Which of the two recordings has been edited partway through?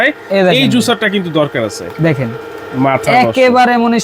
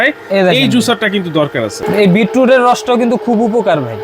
second; 1 cut; at 1.8 s

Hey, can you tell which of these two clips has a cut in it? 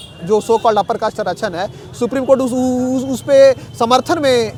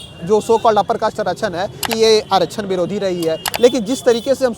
second; 2 cuts; at 1.9 s, 3.5 s

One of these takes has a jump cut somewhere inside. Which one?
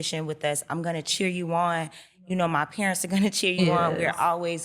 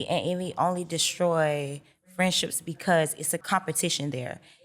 second; 1 cut; at 3.4 s

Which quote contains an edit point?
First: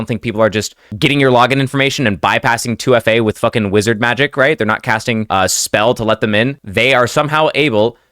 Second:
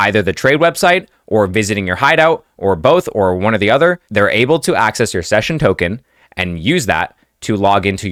first; 2 cuts; at 5.3 s, 6.6 s

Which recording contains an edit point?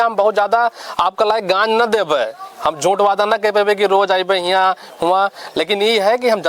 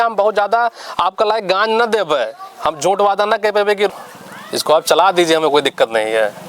second; 1 cut; at 3.9 s

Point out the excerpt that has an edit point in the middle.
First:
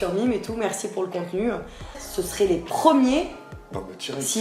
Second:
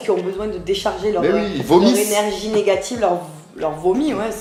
first; 1 cut; at 2.0 s

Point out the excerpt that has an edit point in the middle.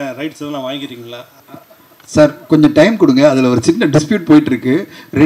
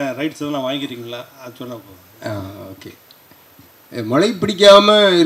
first; 1 cut; at 1.4 s

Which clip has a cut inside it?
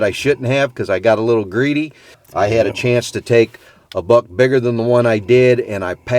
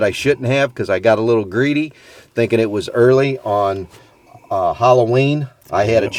first; 1 cut; at 2.2 s

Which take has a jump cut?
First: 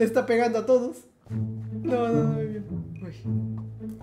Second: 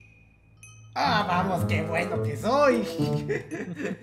first; 1 cut; at 2.7 s

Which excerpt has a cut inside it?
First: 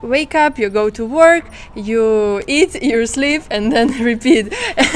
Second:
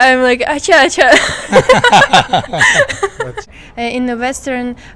second; 1 cut; at 3.5 s

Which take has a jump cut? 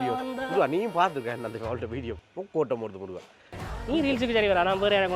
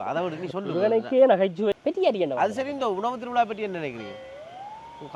second; 1 cut; at 1.7 s

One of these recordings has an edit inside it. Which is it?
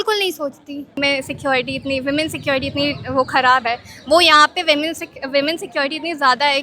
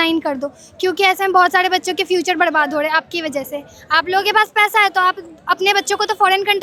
first; 1 cut; at 1.0 s

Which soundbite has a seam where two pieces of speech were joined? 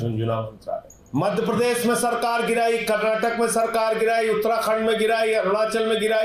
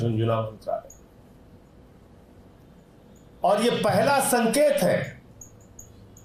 first; 1 cut; at 0.9 s

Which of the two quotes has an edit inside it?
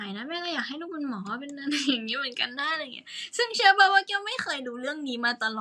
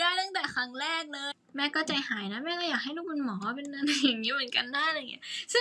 second; 1 cut; at 1.2 s

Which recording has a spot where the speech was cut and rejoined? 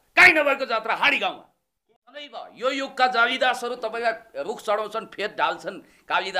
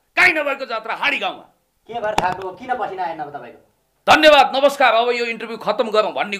first; 1 cut; at 1.8 s

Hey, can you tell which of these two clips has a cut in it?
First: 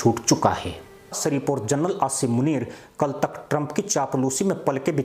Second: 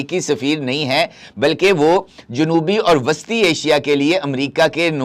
first; 1 cut; at 1.2 s

